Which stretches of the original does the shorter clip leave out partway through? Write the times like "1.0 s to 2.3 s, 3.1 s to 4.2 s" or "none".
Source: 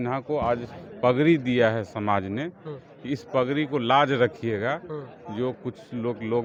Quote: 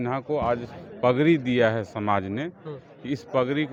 none

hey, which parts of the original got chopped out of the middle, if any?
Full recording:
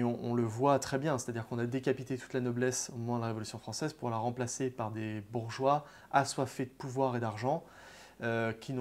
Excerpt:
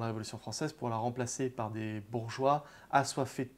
none

